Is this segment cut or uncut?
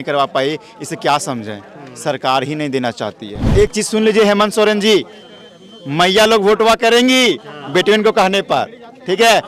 cut